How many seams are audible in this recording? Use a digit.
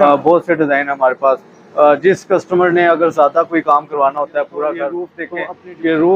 1